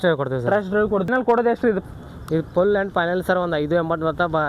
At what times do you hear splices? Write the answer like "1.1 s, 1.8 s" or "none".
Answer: 1.1 s